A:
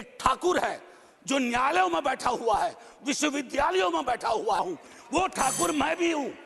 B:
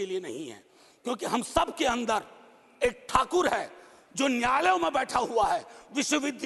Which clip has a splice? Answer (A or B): A